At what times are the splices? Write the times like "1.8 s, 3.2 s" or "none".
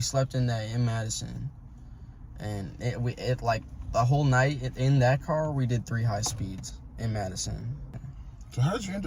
8.0 s